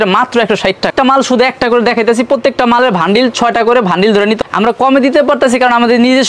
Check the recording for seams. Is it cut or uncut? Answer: cut